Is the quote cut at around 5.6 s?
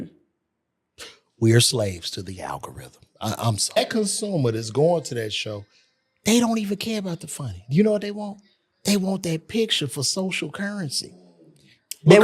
no; 1 cut; at 3.8 s

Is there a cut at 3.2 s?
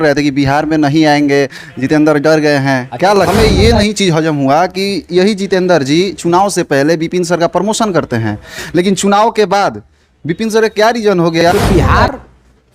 yes; 2 cuts; at 3.2 s, 11.4 s

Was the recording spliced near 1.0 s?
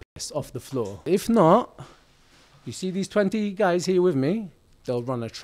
yes; 1 cut; at 1.0 s

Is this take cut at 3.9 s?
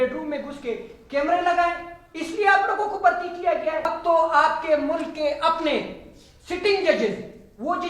yes; 1 cut; at 3.9 s

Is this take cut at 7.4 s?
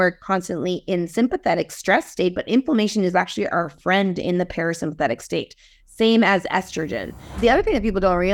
yes; 1 cut; at 7.4 s

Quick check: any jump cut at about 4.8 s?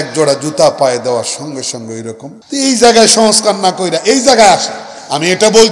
no; 1 cut; at 2.3 s

